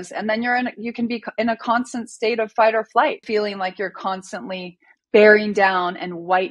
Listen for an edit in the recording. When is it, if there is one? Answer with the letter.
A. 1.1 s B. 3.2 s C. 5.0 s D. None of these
B